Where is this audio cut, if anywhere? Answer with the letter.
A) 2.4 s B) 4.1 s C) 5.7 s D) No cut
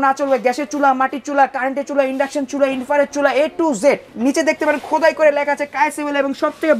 B